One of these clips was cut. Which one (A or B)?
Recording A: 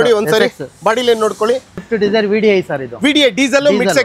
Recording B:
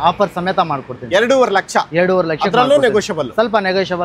A